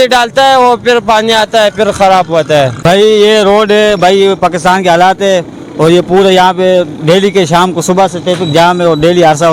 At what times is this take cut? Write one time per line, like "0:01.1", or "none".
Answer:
0:02.8